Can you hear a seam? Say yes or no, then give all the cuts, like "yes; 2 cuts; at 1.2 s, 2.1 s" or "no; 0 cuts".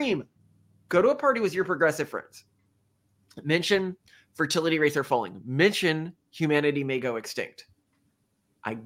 no; 0 cuts